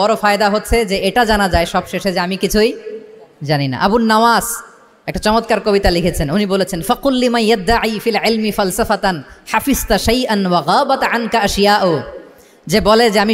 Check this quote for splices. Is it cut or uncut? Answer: uncut